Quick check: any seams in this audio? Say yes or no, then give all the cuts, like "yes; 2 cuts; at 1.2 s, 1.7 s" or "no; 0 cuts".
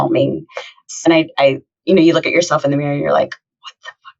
yes; 1 cut; at 1.1 s